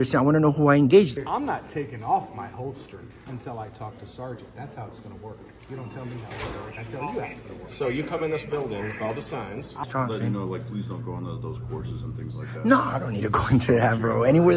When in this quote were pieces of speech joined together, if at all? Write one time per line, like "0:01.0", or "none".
0:01.1
0:09.8